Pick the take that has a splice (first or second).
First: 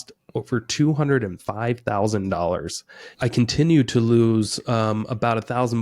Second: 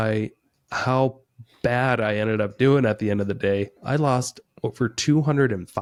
first